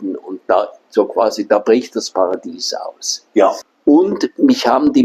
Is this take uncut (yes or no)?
no